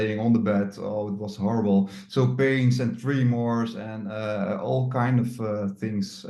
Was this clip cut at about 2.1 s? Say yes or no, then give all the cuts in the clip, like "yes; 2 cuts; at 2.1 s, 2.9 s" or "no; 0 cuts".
no; 0 cuts